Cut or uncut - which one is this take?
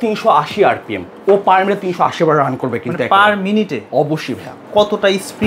uncut